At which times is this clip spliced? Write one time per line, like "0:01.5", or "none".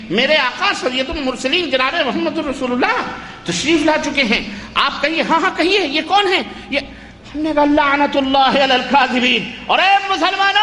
none